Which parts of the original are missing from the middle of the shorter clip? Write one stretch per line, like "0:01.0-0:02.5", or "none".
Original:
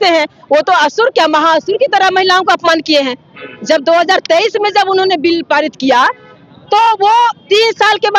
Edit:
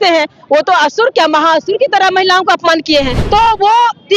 0:03.2-0:06.6